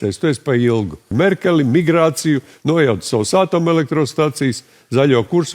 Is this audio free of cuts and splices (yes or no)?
no